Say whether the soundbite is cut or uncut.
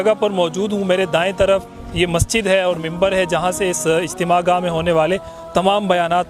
uncut